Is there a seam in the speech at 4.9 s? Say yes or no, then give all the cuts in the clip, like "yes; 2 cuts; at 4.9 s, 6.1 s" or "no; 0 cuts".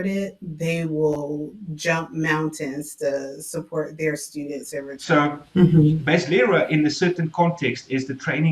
yes; 1 cut; at 4.9 s